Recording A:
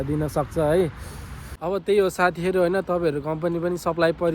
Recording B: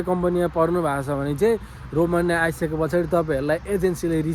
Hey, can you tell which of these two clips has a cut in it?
A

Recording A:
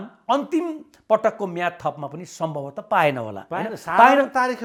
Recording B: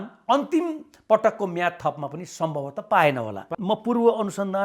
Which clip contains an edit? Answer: B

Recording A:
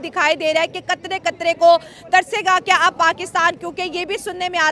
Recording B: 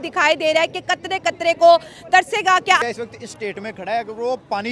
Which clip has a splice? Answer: B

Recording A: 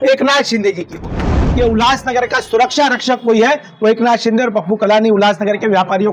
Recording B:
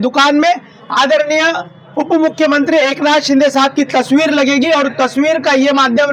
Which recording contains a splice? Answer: A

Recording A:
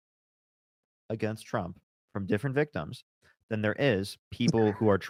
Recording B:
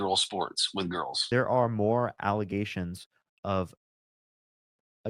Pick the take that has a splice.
B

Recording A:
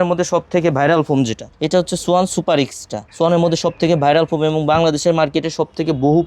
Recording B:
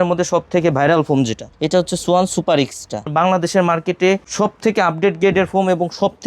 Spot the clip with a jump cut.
B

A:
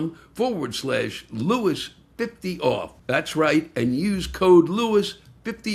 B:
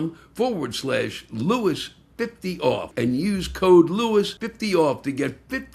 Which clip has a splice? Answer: B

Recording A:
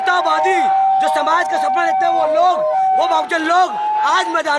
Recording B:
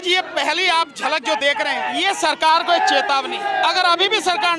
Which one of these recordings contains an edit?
B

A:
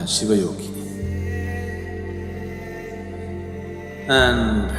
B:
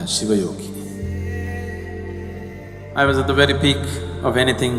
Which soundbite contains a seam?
B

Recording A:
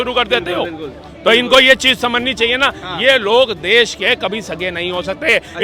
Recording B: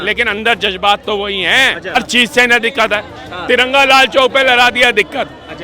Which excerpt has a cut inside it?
B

